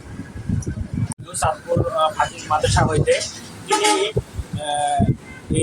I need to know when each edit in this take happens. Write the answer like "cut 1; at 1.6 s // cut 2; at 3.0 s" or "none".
cut 1; at 1.3 s